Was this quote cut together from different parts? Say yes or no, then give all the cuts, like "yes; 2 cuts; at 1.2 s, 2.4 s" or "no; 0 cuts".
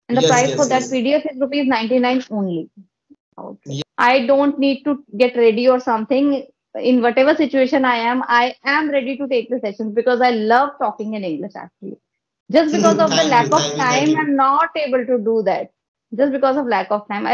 yes; 1 cut; at 3.6 s